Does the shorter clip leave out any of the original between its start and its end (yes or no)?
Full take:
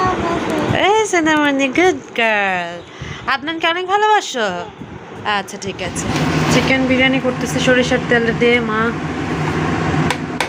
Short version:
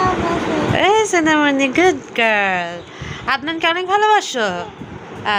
no